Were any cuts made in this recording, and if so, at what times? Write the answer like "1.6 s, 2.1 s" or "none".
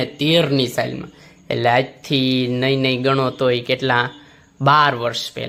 none